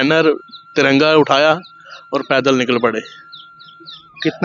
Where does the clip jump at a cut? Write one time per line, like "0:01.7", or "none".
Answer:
none